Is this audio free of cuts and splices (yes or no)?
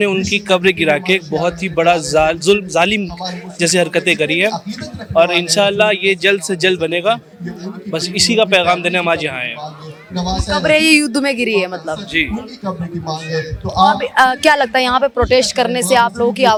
yes